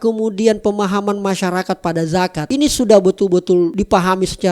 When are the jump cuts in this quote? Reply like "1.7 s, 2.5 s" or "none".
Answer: 2.5 s, 3.7 s